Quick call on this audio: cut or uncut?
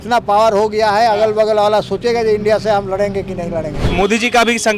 cut